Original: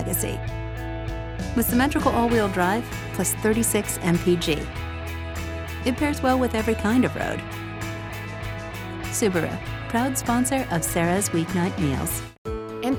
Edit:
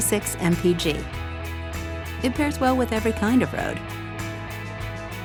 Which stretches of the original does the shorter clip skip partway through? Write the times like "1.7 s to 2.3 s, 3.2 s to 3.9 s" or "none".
none